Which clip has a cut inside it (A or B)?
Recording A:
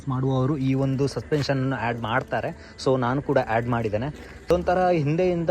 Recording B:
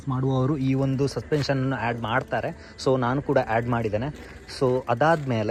A